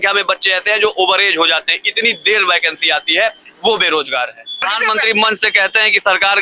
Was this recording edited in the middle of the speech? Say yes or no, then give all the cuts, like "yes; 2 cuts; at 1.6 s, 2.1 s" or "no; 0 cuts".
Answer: yes; 1 cut; at 4.7 s